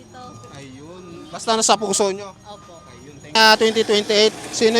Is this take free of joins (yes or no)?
no